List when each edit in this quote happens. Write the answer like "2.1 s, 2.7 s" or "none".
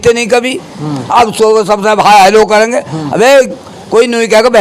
none

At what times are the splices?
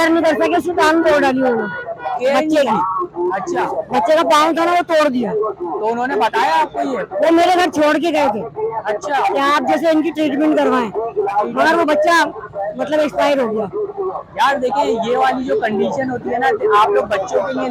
none

